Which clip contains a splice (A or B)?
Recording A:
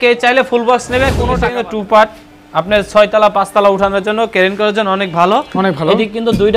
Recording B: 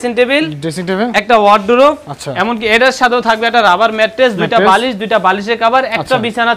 A